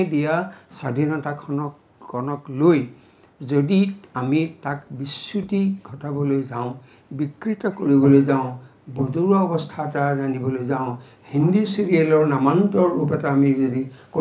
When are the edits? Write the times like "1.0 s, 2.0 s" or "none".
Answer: none